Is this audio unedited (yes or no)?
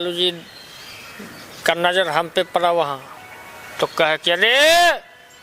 yes